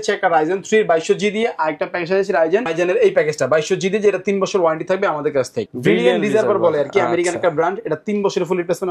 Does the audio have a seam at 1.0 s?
no; 2 cuts; at 2.6 s, 5.7 s

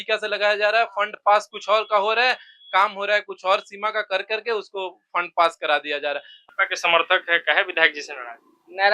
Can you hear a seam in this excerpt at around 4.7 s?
no; 1 cut; at 6.4 s

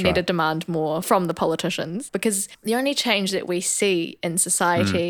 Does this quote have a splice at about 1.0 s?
yes; 2 cuts; at 1.0 s, 2.0 s

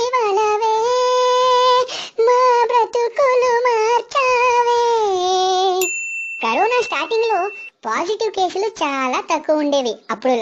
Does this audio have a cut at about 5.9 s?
yes; 1 cut; at 5.9 s

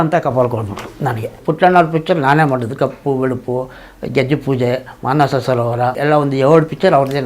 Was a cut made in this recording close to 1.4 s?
yes; 2 cuts; at 1.4 s, 6.0 s

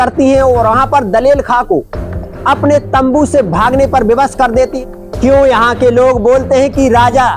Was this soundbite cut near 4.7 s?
yes; 1 cut; at 4.7 s

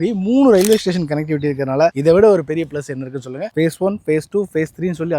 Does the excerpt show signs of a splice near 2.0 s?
yes; 2 cuts; at 2.0 s, 3.4 s

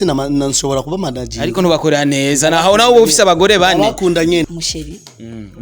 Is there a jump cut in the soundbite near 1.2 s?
no; 1 cut; at 4.5 s

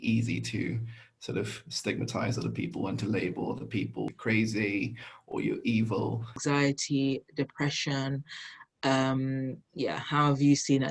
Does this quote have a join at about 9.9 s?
no; 2 cuts; at 4.1 s, 6.4 s

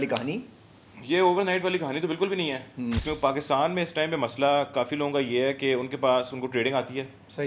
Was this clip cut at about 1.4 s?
no; 1 cut; at 3.1 s

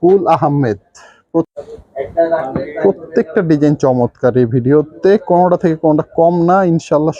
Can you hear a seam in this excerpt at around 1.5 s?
yes; 1 cut; at 1.5 s

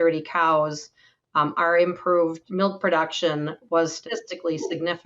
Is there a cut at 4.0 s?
yes; 2 cuts; at 2.4 s, 4.0 s

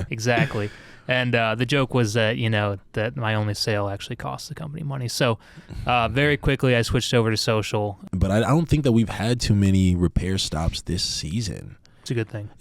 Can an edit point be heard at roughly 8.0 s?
yes; 1 cut; at 8.0 s

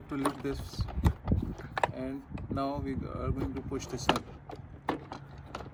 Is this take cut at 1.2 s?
no; 0 cuts

